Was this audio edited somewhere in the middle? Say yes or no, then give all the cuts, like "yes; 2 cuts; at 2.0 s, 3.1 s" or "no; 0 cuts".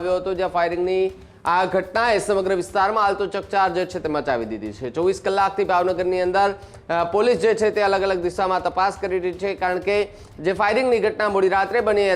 no; 0 cuts